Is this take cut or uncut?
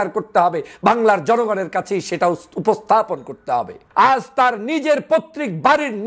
cut